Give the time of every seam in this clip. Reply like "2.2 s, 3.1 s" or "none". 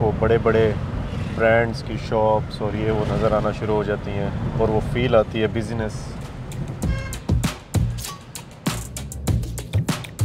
none